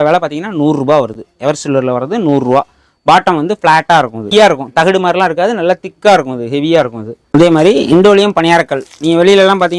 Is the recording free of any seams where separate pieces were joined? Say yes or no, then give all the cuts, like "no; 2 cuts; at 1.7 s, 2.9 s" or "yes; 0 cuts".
yes; 0 cuts